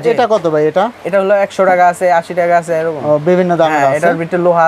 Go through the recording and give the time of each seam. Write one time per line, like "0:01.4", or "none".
none